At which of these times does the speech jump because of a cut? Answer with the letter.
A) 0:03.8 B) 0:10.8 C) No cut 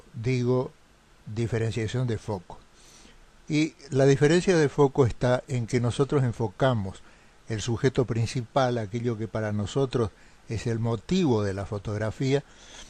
C